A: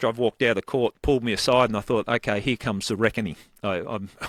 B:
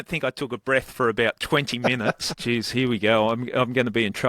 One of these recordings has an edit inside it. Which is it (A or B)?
B